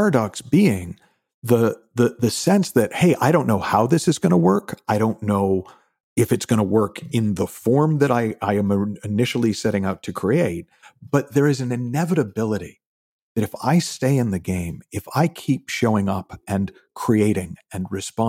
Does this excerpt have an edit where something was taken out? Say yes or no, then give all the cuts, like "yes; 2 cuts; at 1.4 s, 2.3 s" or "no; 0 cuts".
no; 0 cuts